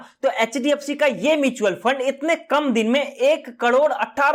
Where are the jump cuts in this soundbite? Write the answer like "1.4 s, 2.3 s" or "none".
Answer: none